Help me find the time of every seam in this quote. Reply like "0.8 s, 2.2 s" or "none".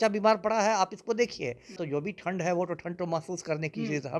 1.8 s